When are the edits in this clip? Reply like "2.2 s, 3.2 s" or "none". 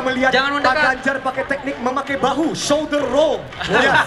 none